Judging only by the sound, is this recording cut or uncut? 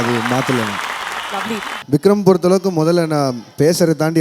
cut